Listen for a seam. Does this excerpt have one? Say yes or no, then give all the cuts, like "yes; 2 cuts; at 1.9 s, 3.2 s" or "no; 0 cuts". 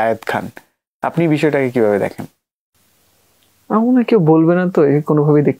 no; 0 cuts